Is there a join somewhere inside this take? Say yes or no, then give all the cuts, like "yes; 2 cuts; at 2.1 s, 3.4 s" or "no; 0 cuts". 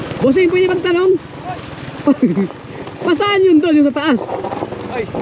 no; 0 cuts